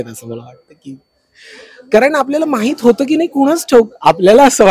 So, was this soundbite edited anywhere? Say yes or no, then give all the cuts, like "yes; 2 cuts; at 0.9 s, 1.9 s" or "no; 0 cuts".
no; 0 cuts